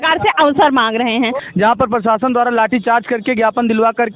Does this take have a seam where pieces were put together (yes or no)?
yes